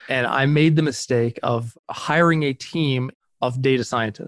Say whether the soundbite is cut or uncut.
uncut